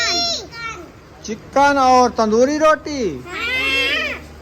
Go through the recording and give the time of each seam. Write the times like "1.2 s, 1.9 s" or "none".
none